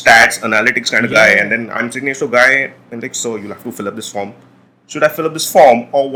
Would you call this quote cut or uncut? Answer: uncut